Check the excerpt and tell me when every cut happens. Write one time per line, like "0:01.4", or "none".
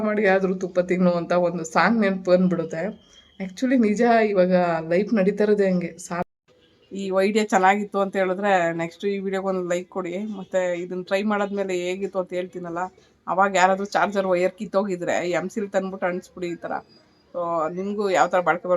0:06.2